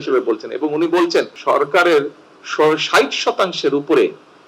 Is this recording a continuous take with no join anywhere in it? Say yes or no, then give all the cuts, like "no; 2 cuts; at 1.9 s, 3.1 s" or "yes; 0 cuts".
no; 1 cut; at 1.3 s